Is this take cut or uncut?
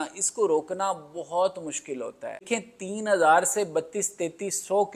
cut